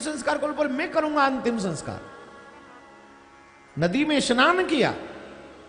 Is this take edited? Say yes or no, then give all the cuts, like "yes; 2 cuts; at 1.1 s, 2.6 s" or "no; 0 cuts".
no; 0 cuts